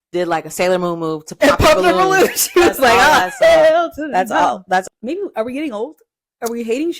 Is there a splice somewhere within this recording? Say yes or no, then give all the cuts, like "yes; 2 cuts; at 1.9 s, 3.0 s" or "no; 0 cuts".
yes; 1 cut; at 4.9 s